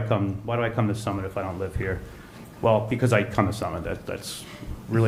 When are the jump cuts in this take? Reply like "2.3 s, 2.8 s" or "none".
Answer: none